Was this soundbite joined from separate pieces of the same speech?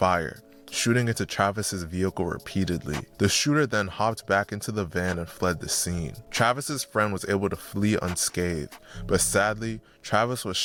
no; 0 cuts

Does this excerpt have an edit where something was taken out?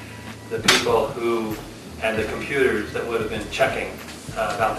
no; 0 cuts

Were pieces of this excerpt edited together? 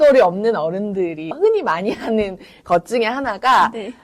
no; 0 cuts

